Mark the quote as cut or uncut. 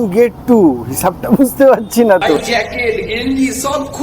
cut